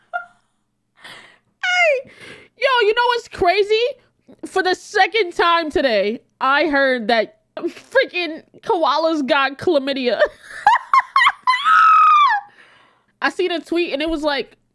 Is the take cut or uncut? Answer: cut